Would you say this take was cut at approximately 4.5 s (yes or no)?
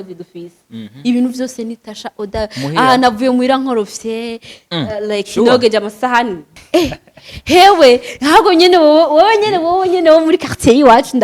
no